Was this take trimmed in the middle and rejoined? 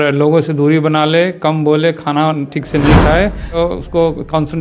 yes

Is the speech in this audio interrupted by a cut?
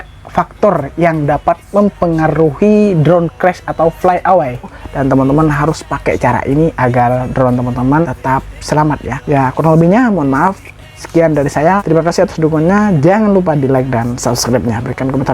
yes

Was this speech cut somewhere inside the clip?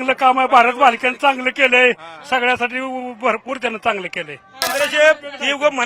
yes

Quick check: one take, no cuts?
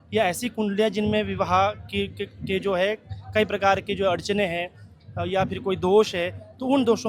yes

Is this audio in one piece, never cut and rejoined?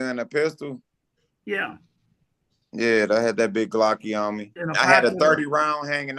no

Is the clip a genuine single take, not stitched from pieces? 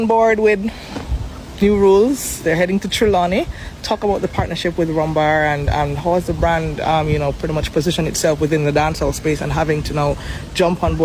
yes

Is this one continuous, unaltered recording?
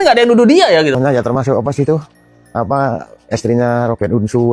no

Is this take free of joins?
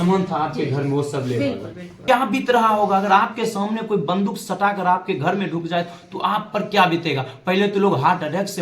no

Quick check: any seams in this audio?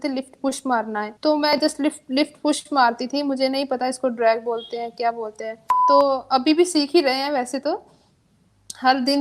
yes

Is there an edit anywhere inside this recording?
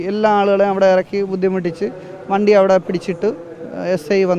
no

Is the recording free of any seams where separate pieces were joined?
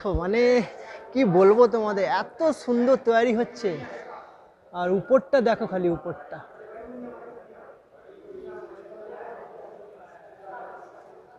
yes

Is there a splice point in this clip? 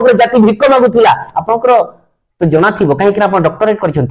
no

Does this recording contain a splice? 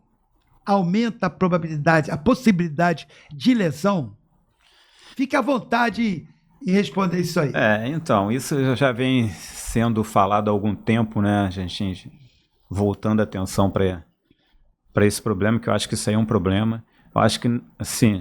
no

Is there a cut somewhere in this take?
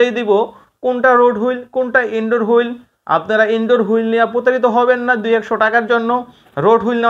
no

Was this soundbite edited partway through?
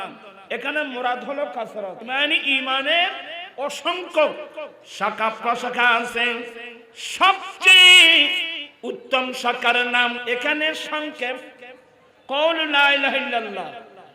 yes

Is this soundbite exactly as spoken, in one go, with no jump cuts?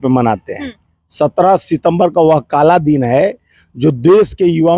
yes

